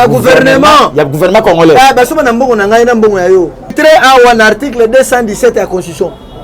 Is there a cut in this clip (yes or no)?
yes